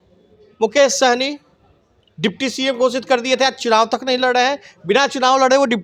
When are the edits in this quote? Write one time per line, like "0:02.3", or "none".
none